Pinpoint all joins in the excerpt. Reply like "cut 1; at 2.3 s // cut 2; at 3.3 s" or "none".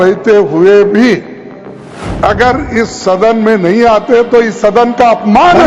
none